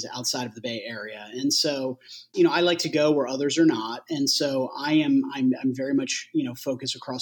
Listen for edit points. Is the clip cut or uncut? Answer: cut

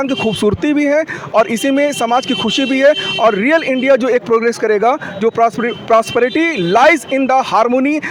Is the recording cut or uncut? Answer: uncut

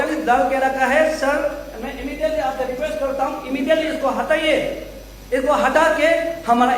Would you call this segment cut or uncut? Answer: uncut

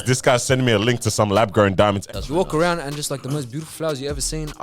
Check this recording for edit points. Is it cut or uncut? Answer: cut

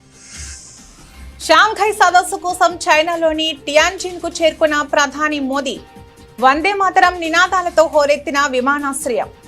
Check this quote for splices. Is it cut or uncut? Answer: cut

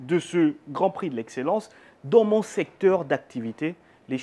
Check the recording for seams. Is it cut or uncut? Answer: uncut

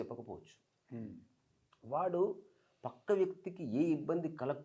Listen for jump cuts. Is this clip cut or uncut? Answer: uncut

